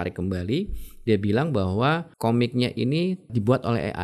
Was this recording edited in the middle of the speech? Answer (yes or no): yes